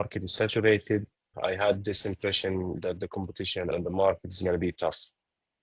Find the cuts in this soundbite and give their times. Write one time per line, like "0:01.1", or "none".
0:01.3
0:03.7